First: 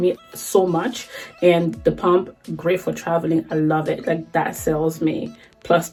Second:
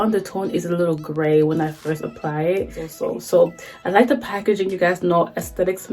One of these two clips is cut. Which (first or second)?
second